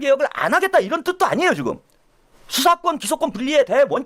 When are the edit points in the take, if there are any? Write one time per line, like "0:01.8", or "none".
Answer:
none